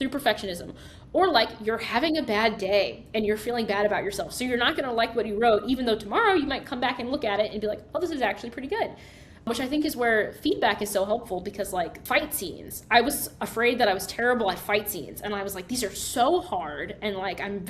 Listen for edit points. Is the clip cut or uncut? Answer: cut